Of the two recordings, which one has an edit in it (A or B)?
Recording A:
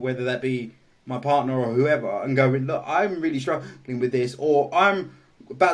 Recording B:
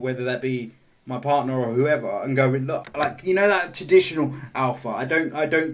B